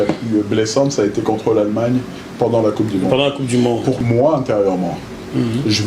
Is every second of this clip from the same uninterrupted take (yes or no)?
no